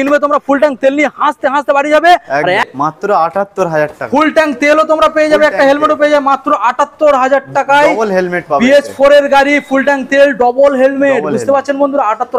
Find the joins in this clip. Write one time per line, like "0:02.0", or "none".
0:02.6